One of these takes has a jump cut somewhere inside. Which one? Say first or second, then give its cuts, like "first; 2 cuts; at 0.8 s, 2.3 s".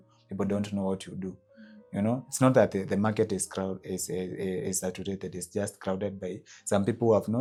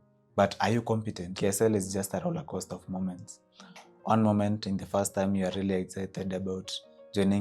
second; 1 cut; at 1.3 s